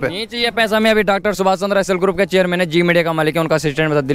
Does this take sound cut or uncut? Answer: uncut